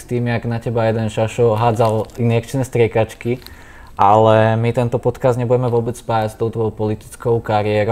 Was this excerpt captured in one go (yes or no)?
yes